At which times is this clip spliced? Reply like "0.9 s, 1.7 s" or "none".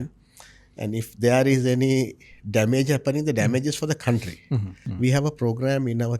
4.8 s